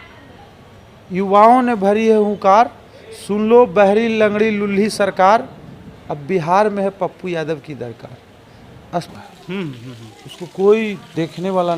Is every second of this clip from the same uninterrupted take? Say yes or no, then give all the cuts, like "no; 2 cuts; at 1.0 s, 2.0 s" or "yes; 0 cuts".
no; 1 cut; at 9.1 s